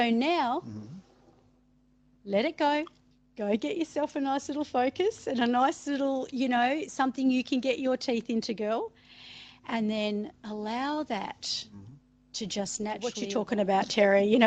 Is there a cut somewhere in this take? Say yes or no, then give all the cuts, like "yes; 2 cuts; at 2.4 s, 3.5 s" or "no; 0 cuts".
yes; 1 cut; at 13.3 s